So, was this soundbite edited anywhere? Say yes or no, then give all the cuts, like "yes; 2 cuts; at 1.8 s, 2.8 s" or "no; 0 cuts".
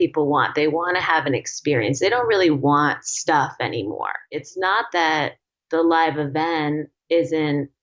yes; 1 cut; at 4.4 s